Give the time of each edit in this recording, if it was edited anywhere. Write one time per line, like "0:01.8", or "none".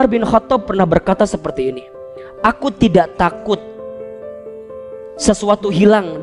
0:03.6
0:05.1